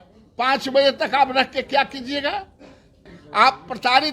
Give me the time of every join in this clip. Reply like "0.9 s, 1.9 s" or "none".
3.1 s